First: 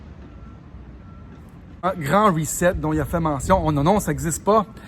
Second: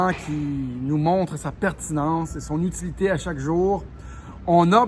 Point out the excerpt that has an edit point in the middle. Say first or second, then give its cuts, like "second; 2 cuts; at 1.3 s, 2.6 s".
first; 1 cut; at 1.8 s